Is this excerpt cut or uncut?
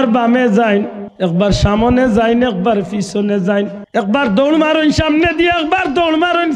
cut